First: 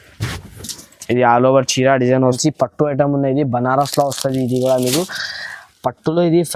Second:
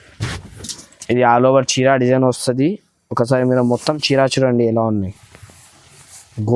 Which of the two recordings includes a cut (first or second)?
first